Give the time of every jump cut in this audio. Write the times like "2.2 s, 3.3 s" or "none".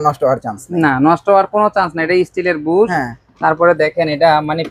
none